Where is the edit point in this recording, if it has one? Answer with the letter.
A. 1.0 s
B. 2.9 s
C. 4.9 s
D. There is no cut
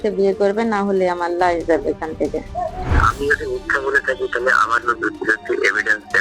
B